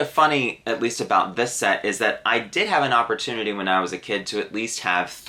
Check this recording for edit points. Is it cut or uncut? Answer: uncut